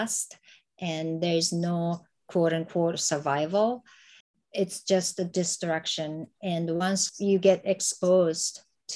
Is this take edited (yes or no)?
no